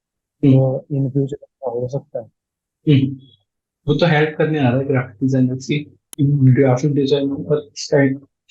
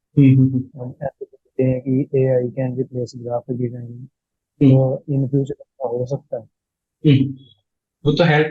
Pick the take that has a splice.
first; 1 cut; at 6.0 s

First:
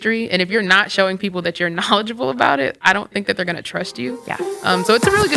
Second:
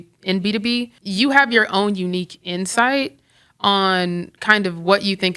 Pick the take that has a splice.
second; 1 cut; at 1.0 s

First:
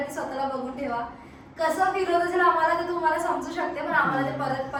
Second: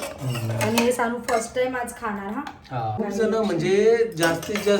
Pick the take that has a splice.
second; 1 cut; at 3.0 s

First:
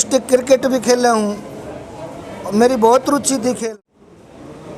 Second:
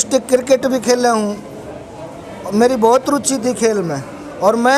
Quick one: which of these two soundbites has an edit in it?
first; 1 cut; at 3.7 s

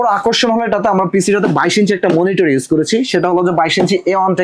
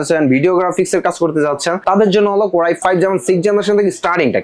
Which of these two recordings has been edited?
second; 2 cuts; at 1.8 s, 2.8 s

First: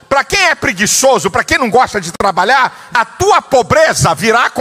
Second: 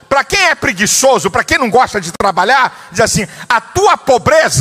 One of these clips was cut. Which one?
first; 1 cut; at 2.8 s

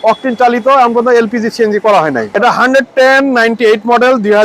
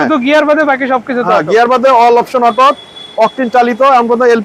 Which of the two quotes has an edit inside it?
first; 1 cut; at 2.3 s

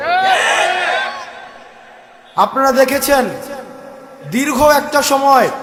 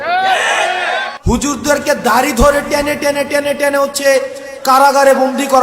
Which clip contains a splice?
second; 1 cut; at 1.1 s

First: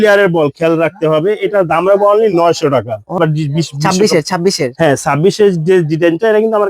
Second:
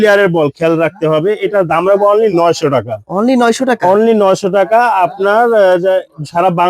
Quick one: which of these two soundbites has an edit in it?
first; 1 cut; at 3.1 s

